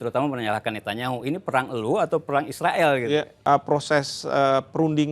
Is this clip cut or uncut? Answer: cut